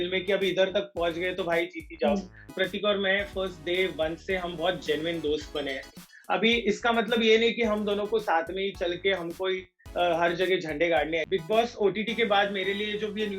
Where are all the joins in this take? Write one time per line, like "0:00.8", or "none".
0:02.5
0:06.1
0:11.2